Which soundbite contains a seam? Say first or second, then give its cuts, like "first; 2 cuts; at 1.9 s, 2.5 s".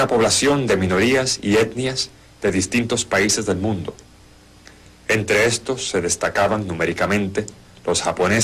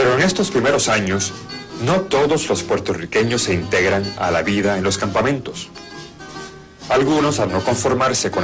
first; 1 cut; at 3.7 s